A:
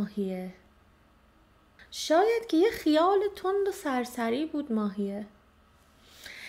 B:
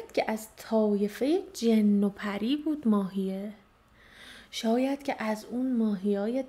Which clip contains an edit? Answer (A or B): A